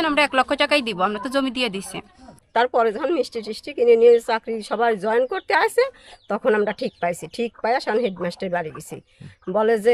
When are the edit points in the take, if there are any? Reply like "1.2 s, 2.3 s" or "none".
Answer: 2.3 s